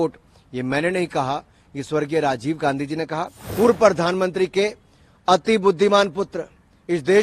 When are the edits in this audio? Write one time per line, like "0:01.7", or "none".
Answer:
0:03.4